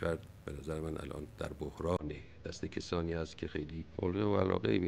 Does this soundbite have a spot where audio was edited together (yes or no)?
yes